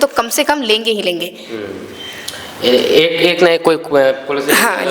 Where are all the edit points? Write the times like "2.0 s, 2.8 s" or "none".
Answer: none